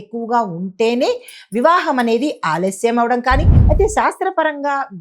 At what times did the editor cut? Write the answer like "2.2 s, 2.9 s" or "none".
3.5 s